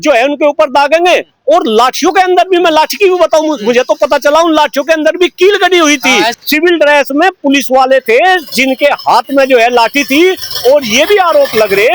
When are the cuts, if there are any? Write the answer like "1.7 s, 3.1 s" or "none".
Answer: 6.4 s